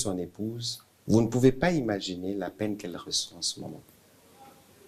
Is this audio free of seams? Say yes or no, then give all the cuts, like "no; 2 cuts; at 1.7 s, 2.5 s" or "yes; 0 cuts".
yes; 0 cuts